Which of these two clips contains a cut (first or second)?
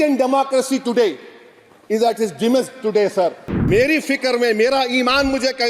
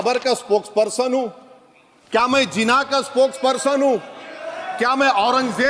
first